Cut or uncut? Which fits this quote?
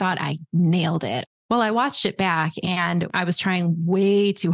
cut